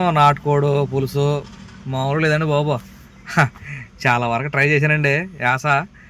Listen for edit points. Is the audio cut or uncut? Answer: uncut